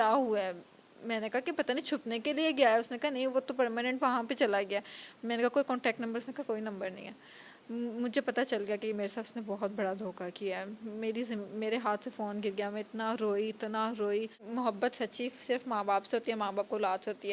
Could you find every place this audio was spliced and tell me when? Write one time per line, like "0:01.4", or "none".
0:14.5